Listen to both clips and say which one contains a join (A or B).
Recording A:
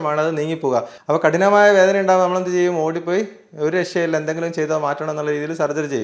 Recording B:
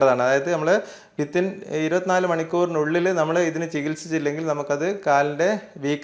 A